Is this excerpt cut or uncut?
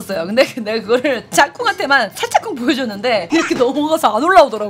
uncut